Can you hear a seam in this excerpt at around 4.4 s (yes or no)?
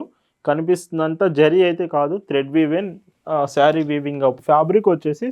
yes